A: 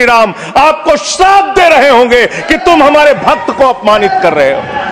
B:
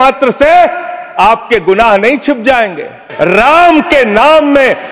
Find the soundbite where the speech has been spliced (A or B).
B